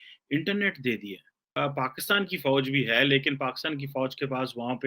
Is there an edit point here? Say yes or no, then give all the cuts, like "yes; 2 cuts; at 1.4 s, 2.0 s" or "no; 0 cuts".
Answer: yes; 1 cut; at 1.5 s